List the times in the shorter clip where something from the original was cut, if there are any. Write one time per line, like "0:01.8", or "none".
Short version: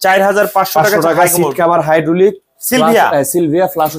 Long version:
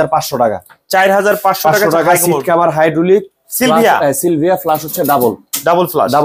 none

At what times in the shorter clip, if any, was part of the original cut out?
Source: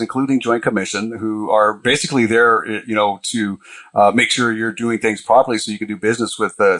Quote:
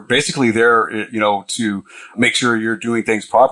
0:02.2

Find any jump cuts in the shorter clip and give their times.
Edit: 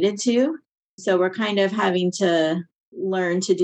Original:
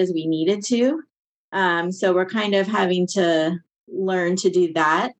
0:01.0

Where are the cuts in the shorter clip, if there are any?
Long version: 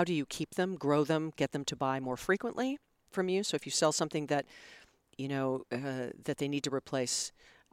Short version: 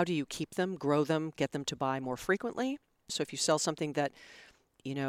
0:03.1

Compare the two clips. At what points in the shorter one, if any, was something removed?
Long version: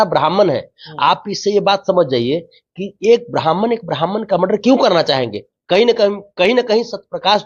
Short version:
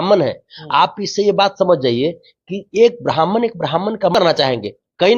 0:04.1

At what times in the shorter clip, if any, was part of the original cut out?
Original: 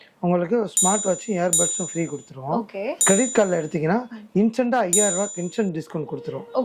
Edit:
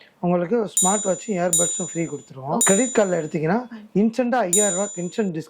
0:02.6

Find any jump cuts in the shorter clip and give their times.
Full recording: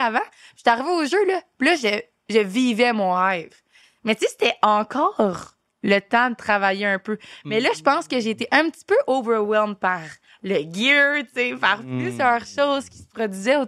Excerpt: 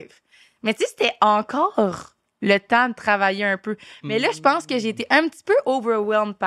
none

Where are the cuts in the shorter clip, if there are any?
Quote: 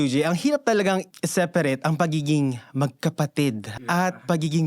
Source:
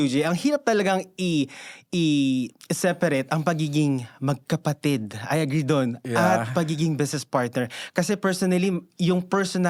0:01.1
0:03.7

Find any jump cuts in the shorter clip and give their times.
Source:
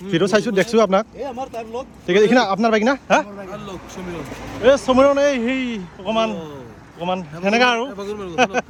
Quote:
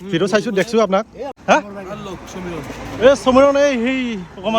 0:01.4

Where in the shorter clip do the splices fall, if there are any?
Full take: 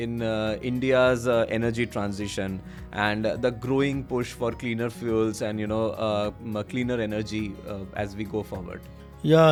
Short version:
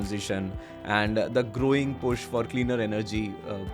0:02.5

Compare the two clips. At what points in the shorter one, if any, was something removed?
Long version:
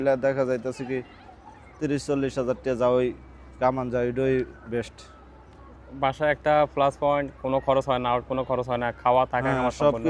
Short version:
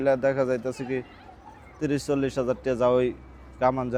none

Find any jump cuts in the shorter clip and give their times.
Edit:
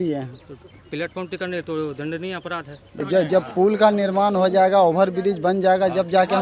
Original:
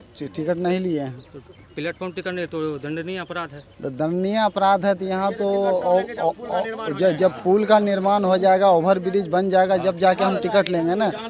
0:02.9

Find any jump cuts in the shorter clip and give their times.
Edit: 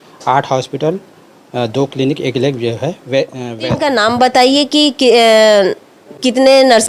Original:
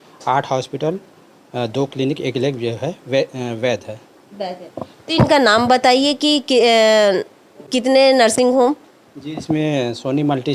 0:03.5

